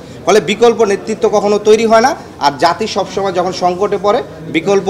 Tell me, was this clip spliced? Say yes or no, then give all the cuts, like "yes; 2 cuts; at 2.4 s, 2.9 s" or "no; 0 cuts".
no; 0 cuts